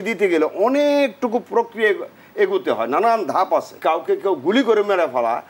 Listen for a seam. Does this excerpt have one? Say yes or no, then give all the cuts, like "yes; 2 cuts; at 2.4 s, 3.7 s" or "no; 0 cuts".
yes; 1 cut; at 3.7 s